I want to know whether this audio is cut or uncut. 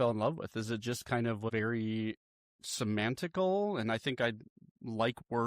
cut